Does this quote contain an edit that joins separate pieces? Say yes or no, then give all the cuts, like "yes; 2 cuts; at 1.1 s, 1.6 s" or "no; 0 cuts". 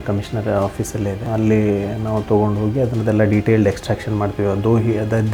yes; 1 cut; at 1.2 s